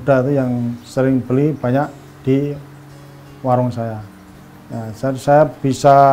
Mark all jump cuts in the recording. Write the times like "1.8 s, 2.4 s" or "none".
4.0 s